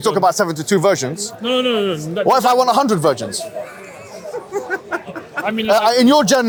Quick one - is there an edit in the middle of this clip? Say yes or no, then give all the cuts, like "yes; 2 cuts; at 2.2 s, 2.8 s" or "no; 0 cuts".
no; 0 cuts